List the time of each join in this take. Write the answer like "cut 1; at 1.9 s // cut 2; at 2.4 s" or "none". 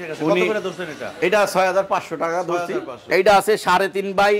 cut 1; at 3.0 s